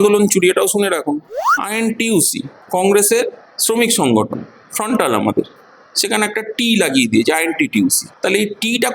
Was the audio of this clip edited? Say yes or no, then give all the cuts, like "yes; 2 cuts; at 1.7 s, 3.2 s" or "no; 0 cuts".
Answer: yes; 1 cut; at 1.3 s